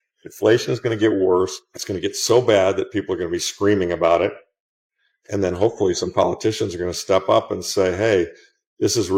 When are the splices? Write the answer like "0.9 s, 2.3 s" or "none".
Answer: none